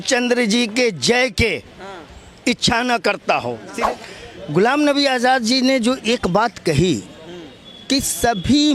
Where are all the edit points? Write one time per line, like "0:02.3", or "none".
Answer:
0:03.6